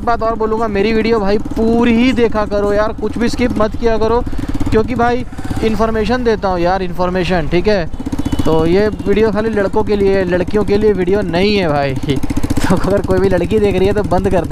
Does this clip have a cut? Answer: no; 0 cuts

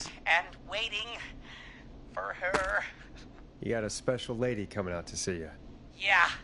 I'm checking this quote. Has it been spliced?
no; 0 cuts

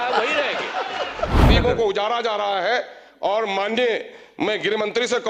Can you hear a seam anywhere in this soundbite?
yes; 1 cut; at 1.5 s

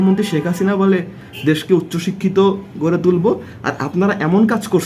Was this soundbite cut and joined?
no; 0 cuts

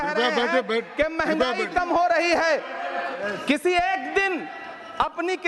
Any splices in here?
yes; 1 cut; at 3.1 s

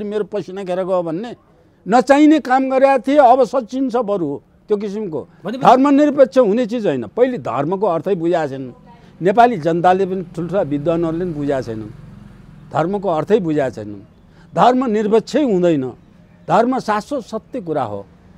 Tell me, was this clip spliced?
no; 0 cuts

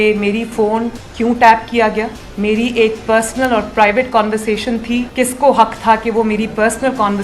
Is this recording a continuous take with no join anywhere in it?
no; 3 cuts; at 1.0 s, 2.2 s, 5.1 s

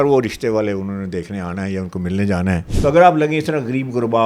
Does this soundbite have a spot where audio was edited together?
yes; 1 cut; at 2.7 s

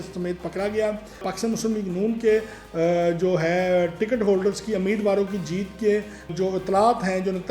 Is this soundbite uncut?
no; 1 cut; at 1.3 s

